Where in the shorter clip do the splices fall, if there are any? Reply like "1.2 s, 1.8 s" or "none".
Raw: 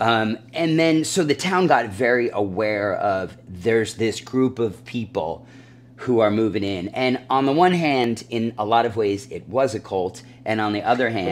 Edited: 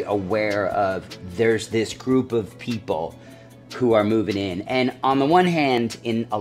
none